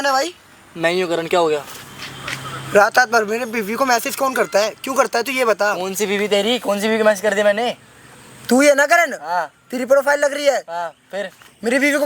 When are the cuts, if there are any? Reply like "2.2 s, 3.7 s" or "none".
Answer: none